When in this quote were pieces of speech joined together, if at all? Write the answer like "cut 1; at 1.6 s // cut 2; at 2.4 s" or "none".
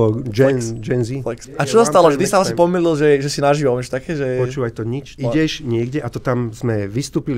cut 1; at 1.5 s // cut 2; at 5.1 s